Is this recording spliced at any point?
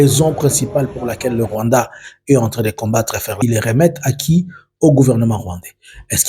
yes; 1 cut; at 3.4 s

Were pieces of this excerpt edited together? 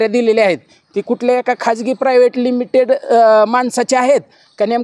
no; 0 cuts

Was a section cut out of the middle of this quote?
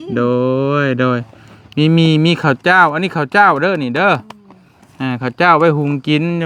no; 0 cuts

